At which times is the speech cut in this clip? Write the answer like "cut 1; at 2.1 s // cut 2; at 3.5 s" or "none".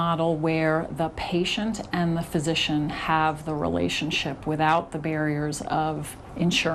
none